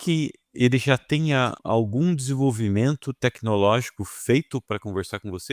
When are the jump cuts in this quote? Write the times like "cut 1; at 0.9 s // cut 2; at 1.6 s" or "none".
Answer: cut 1; at 1.6 s